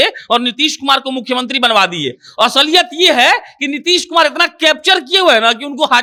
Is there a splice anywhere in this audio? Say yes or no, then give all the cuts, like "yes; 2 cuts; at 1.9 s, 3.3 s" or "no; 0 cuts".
no; 0 cuts